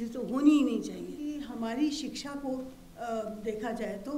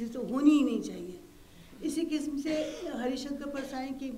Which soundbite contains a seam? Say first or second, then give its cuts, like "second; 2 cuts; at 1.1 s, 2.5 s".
first; 1 cut; at 1.2 s